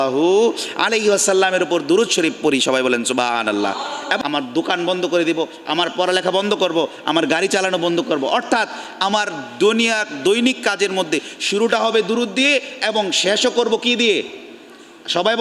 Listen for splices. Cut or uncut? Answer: cut